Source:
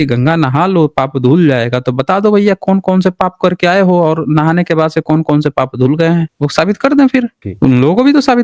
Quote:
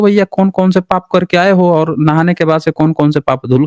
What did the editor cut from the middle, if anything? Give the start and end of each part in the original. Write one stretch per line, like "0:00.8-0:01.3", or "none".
none

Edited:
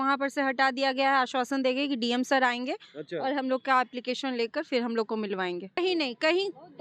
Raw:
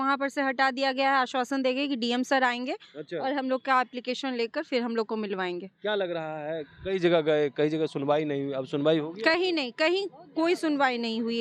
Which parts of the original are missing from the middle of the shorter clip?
0:05.8-0:09.4

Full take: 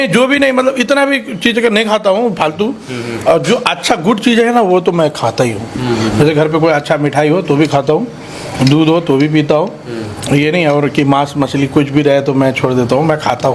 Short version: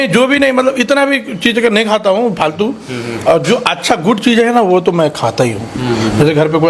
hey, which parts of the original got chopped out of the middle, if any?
none

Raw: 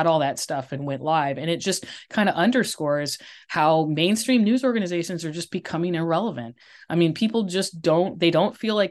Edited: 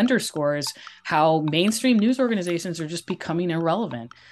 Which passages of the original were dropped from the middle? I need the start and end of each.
none

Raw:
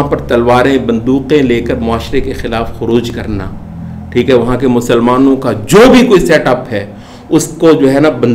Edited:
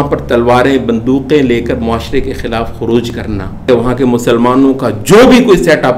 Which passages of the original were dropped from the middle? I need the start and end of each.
0:03.7-0:04.3

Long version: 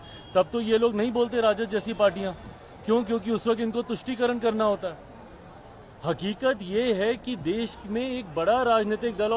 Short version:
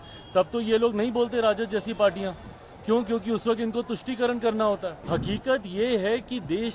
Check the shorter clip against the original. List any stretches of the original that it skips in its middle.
0:05.0-0:05.9

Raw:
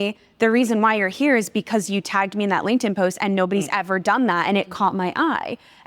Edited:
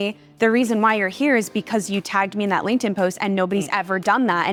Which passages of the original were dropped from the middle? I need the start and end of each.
none

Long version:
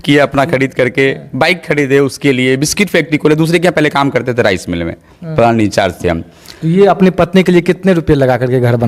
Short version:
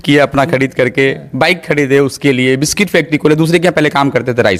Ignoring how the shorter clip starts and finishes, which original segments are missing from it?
none

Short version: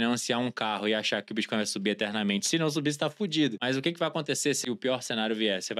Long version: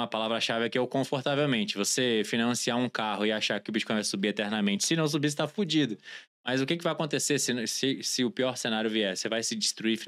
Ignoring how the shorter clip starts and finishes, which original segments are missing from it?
0:06.0-0:06.4
0:07.4-0:08.1

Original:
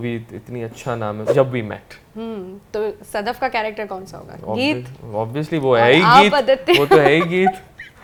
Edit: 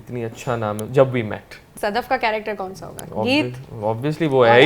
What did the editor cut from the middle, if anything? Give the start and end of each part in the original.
0:02.1-0:03.0

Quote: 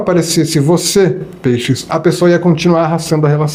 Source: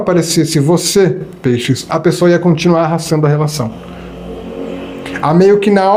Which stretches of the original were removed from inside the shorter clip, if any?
none

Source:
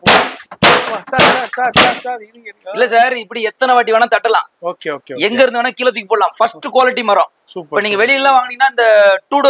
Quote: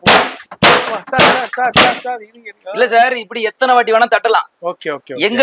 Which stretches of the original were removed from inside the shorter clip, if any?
none

